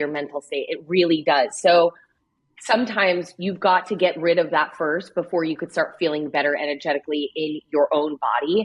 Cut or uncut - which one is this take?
uncut